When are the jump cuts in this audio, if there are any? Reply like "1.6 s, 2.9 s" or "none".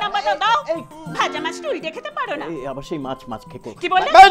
0.9 s